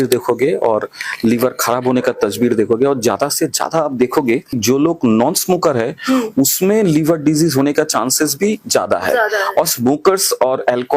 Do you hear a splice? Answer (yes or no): yes